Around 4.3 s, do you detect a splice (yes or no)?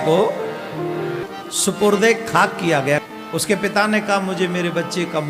no